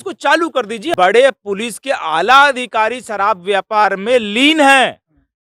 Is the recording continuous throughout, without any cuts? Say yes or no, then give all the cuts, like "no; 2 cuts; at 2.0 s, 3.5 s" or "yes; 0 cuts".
no; 1 cut; at 0.9 s